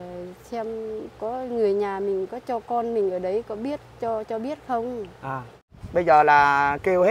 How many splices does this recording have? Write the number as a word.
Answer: one